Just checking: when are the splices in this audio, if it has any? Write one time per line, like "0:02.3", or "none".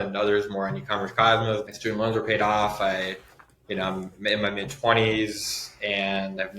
0:01.7